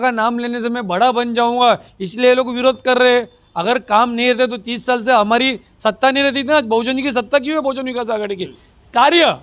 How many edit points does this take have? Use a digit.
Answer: 0